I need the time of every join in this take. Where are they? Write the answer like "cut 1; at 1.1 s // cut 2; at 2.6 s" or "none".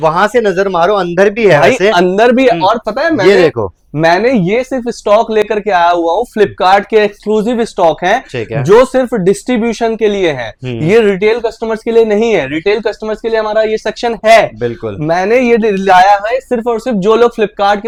none

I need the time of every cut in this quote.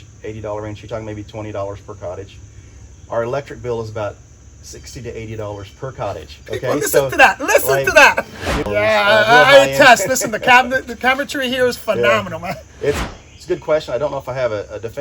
cut 1; at 8.6 s // cut 2; at 13.0 s

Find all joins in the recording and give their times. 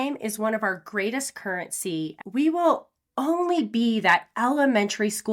cut 1; at 2.2 s

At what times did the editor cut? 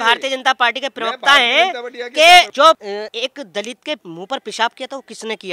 cut 1; at 2.9 s // cut 2; at 4.1 s

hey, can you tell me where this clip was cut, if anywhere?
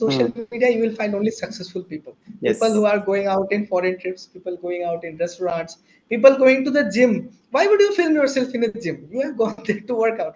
none

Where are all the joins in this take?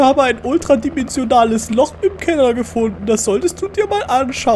none

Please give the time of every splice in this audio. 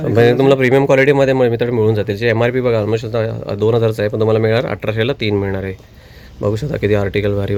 none

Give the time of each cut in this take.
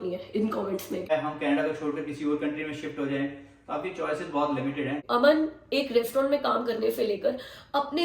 cut 1; at 1.1 s // cut 2; at 5.0 s

